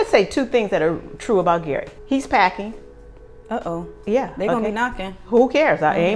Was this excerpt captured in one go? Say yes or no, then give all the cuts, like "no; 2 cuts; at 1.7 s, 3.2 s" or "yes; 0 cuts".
yes; 0 cuts